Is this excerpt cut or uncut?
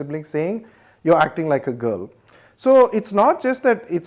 uncut